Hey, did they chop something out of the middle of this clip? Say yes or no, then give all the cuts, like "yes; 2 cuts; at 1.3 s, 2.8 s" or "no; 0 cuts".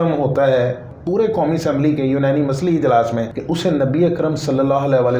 yes; 2 cuts; at 0.9 s, 3.3 s